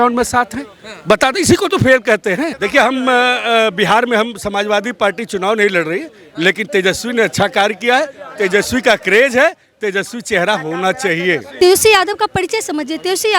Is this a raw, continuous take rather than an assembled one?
no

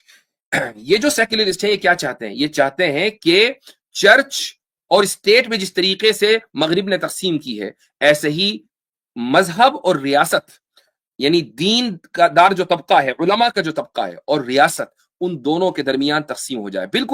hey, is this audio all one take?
yes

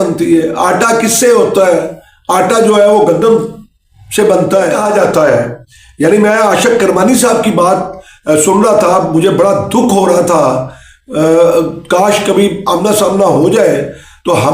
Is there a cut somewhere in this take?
yes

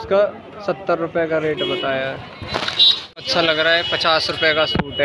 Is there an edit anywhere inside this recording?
yes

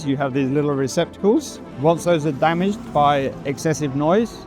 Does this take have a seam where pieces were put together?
yes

